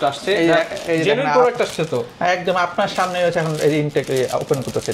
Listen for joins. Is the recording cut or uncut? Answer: uncut